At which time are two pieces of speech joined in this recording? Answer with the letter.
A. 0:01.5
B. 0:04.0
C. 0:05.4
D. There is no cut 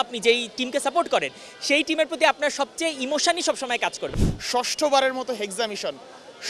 B